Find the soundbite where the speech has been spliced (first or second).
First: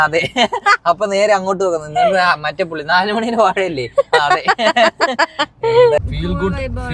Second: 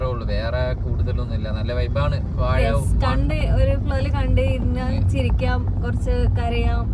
first